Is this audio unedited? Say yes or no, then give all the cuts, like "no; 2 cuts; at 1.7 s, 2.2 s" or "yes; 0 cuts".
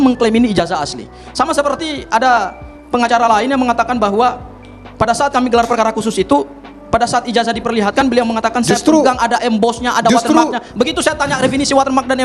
yes; 0 cuts